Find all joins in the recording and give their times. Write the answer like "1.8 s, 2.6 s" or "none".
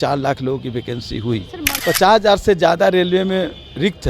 1.7 s